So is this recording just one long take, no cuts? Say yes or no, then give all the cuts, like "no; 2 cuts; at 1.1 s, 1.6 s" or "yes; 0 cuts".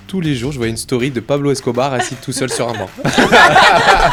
yes; 0 cuts